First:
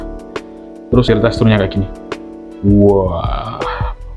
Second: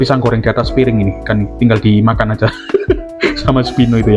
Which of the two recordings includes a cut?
first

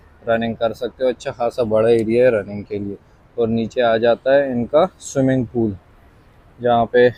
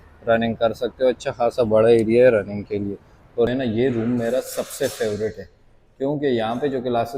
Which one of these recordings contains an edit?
second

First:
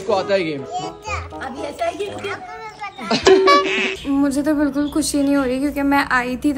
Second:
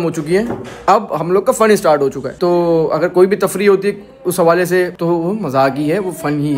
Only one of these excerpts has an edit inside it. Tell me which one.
first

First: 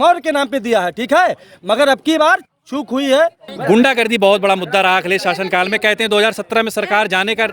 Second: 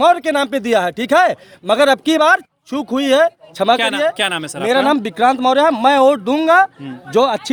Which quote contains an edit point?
first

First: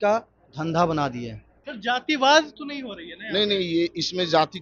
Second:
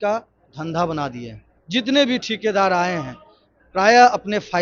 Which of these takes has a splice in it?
first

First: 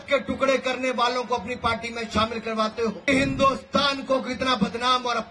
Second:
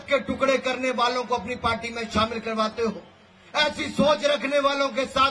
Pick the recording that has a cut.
first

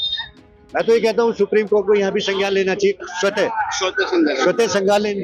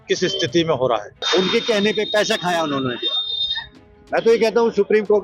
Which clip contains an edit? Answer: second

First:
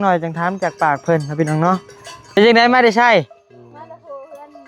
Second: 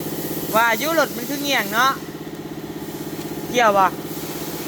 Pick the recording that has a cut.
first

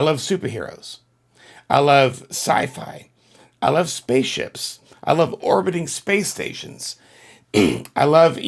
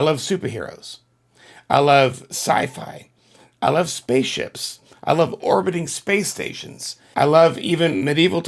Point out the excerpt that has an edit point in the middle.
second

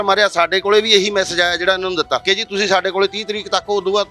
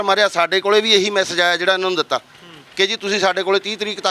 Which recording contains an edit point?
first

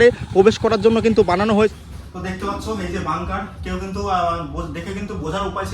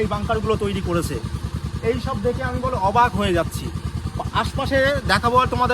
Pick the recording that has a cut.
first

